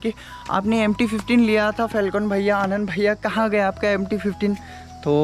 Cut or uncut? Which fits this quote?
uncut